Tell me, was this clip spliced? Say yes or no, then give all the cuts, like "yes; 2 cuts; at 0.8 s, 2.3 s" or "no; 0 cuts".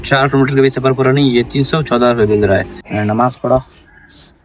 yes; 1 cut; at 2.8 s